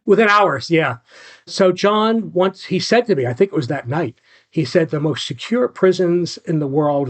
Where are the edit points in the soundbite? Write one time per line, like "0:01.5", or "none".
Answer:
0:01.5